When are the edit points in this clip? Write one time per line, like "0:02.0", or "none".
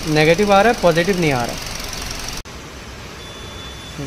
0:02.4

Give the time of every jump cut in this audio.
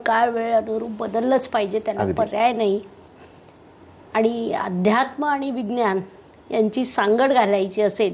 none

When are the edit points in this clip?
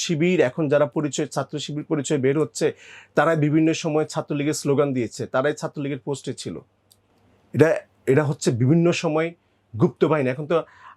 none

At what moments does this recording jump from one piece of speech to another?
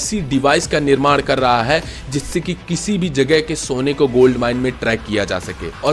none

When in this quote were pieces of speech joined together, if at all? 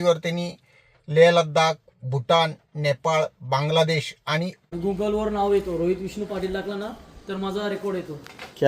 0:04.6

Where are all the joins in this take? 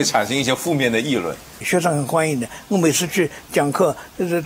0:01.6

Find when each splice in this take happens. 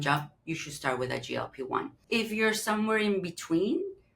0:02.0

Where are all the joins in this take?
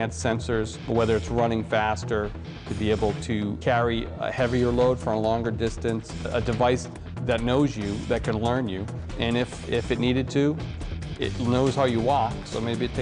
0:05.1

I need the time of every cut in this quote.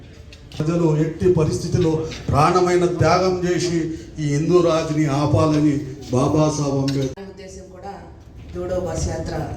0:07.2

